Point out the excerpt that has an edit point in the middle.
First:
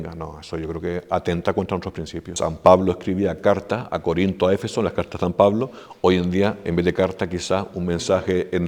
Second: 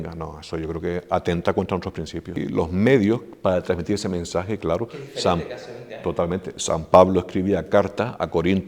first; 1 cut; at 2.3 s

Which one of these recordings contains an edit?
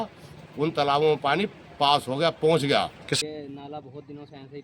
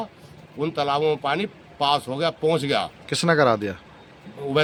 first; 1 cut; at 3.1 s

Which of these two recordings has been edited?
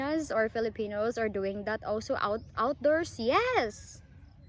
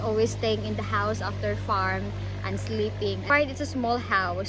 second; 1 cut; at 3.3 s

